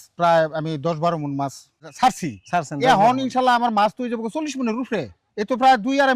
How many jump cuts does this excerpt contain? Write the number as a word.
one